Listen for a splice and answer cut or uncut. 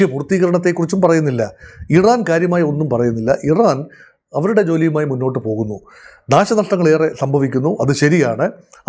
uncut